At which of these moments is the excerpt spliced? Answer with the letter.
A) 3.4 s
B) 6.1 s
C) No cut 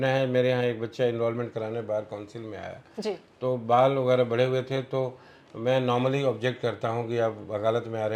C